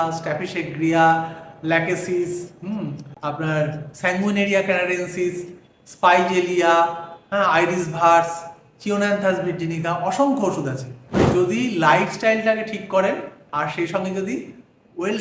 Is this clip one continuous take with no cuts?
no; 2 cuts; at 11.2 s, 13.4 s

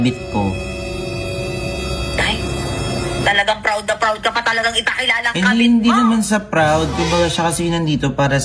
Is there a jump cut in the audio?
no; 0 cuts

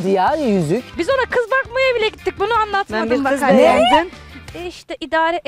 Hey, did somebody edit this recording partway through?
yes; 2 cuts; at 0.9 s, 4.4 s

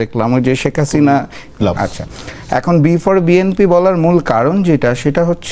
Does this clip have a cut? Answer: yes; 1 cut; at 1.6 s

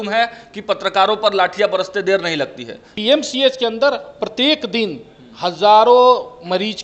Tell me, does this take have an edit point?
yes; 1 cut; at 2.9 s

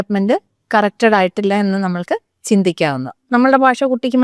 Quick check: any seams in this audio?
yes; 1 cut; at 3.3 s

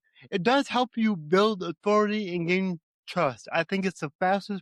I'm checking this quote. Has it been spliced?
no; 0 cuts

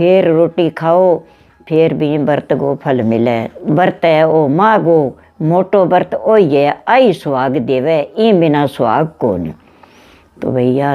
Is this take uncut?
no; 1 cut; at 3.5 s

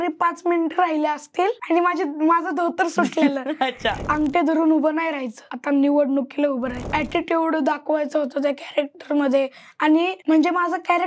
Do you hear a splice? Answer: yes; 4 cuts; at 1.6 s, 4.0 s, 6.9 s, 10.2 s

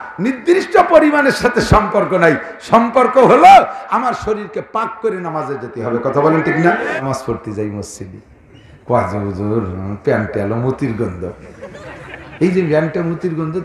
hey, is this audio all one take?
no; 1 cut; at 7.0 s

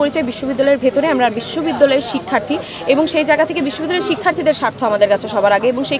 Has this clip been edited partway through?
no; 0 cuts

